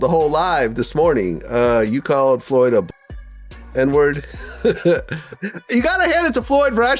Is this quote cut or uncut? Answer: cut